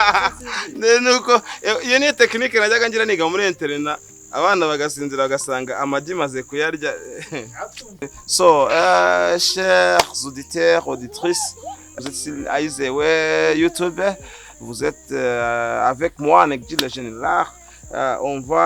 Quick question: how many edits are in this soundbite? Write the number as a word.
two